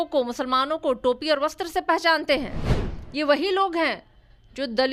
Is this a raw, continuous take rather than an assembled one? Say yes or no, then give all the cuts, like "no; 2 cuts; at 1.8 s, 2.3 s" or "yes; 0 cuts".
yes; 0 cuts